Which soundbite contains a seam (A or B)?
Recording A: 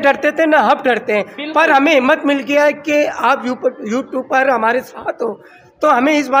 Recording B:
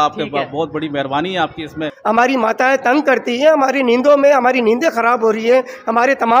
B